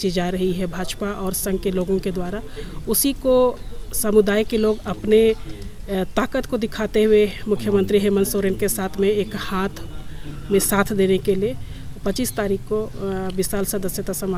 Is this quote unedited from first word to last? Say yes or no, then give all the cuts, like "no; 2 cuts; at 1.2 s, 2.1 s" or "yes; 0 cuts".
yes; 0 cuts